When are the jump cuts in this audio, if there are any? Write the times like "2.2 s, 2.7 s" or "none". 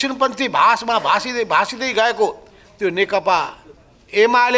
none